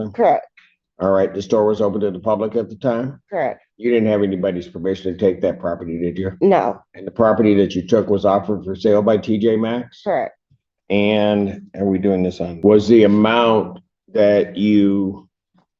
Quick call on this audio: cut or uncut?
cut